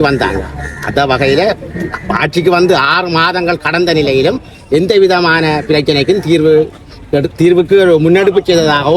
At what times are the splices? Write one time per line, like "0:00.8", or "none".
none